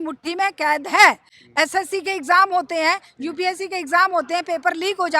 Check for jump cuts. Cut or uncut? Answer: uncut